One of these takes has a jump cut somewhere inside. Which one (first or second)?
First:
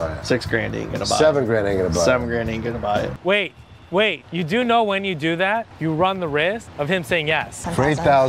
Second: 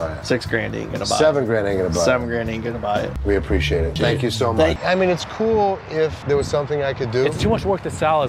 first